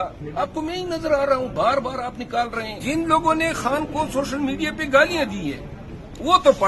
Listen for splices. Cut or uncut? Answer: cut